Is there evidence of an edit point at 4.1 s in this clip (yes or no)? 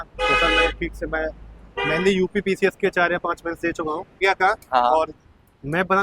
yes